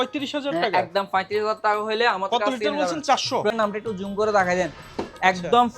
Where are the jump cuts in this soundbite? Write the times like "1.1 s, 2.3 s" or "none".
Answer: 3.5 s